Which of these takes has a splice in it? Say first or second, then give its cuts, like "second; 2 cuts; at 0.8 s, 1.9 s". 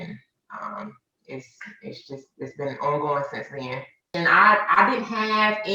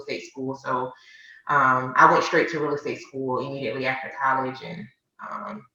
first; 1 cut; at 4.1 s